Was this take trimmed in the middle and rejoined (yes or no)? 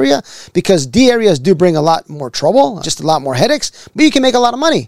yes